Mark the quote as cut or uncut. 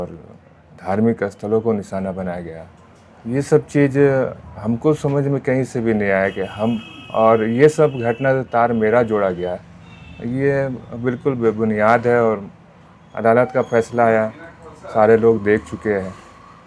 uncut